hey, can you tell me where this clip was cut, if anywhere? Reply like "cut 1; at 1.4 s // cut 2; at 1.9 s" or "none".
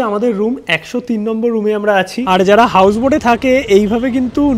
cut 1; at 2.2 s